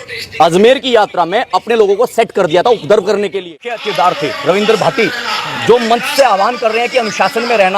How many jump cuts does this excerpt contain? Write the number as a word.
one